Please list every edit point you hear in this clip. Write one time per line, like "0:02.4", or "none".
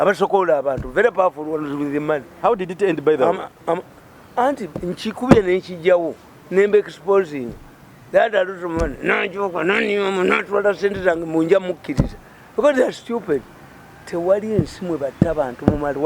none